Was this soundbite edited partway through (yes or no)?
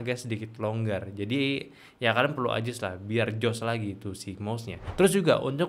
yes